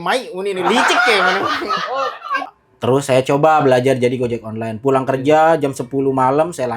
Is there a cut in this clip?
yes; 1 cut; at 2.3 s

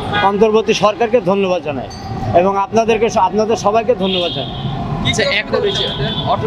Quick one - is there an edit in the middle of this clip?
no; 0 cuts

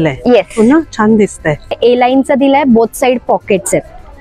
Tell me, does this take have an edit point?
yes; 1 cut; at 1.8 s

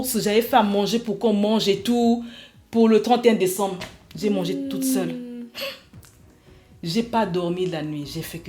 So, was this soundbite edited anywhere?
no; 0 cuts

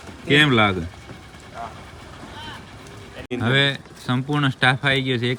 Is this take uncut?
yes; 0 cuts

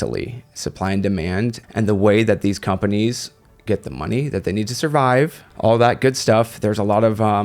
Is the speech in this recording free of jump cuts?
no; 2 cuts; at 1.6 s, 5.4 s

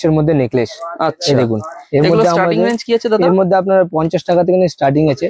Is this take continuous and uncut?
yes; 0 cuts

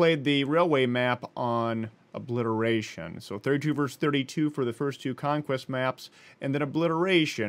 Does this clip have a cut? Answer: no; 0 cuts

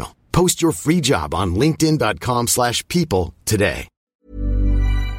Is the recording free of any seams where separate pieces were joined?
no; 1 cut; at 4.0 s

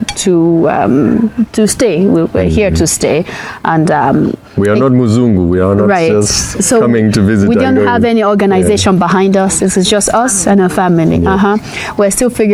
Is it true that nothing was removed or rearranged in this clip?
yes; 0 cuts

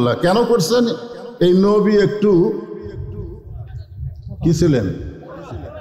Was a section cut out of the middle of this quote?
no; 0 cuts

